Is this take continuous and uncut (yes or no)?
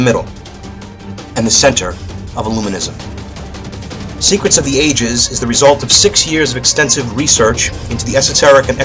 no